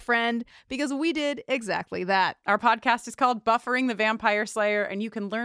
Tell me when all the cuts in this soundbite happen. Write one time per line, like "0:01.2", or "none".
0:02.4